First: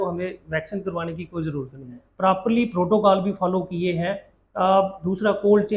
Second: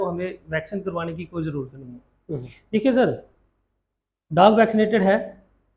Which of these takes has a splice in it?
first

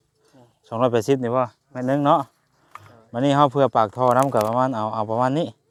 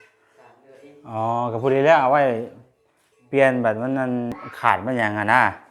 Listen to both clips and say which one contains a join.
second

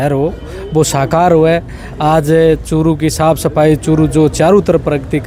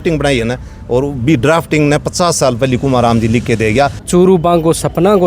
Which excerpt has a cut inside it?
second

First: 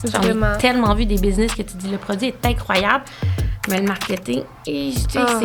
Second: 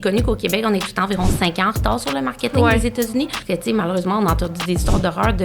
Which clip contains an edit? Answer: second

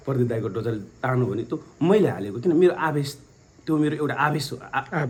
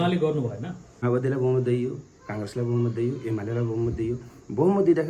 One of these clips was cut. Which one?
second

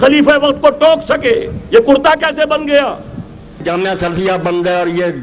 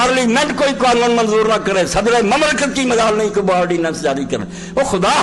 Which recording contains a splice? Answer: first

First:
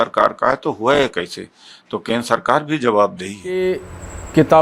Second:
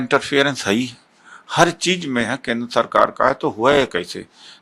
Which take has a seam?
first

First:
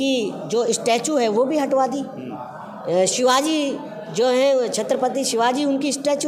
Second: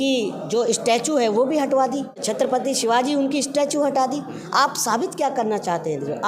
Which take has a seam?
second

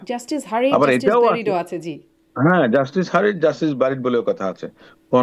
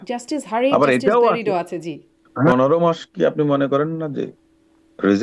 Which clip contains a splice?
second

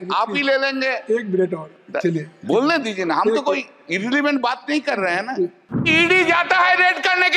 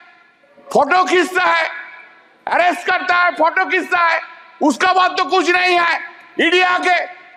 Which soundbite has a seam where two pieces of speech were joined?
first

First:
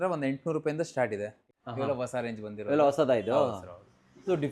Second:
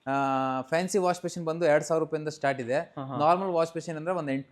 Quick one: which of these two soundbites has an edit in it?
first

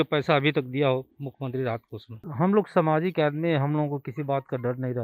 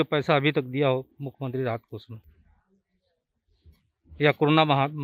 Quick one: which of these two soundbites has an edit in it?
first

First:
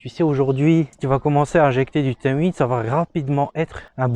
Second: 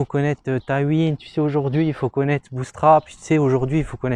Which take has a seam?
first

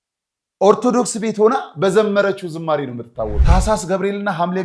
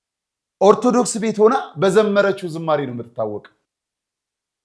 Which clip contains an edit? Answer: first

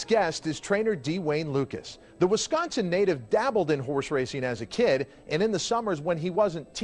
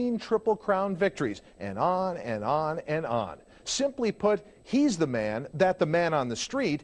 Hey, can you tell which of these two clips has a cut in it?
second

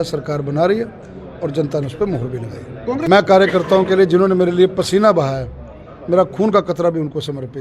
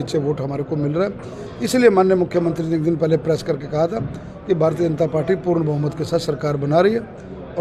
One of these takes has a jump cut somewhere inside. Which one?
first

